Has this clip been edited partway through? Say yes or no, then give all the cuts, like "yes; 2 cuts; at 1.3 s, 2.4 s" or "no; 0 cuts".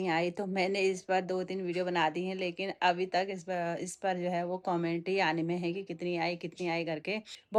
no; 0 cuts